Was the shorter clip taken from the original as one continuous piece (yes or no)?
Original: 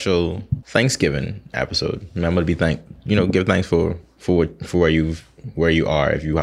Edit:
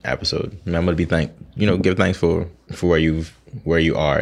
no